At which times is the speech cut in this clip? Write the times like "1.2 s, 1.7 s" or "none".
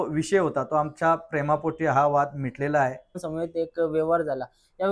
3.2 s